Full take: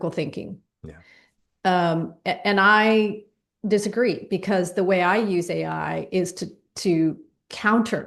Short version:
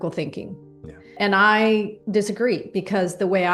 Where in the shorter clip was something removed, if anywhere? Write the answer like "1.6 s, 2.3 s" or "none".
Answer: 1.1 s, 2.0 s